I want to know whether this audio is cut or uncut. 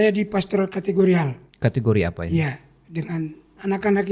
cut